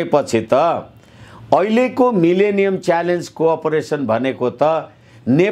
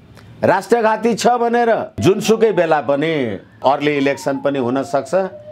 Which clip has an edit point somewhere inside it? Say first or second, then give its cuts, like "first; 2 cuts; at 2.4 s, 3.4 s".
second; 1 cut; at 2.0 s